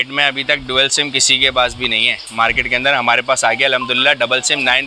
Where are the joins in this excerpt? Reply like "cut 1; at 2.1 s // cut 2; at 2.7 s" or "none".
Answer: none